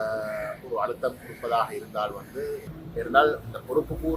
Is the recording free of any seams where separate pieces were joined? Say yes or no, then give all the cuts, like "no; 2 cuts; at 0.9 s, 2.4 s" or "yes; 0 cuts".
no; 1 cut; at 2.8 s